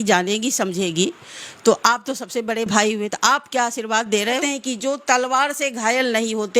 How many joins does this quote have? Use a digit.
1